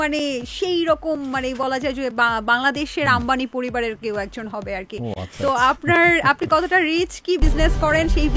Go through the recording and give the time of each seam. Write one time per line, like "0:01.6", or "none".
none

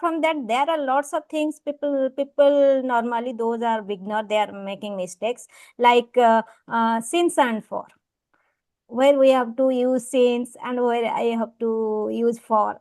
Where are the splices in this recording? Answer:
none

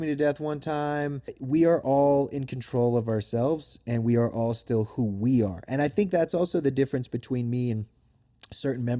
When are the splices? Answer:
0:01.3

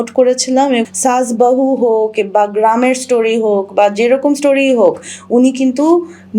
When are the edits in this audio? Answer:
0:00.9

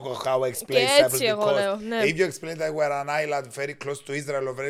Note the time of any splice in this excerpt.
none

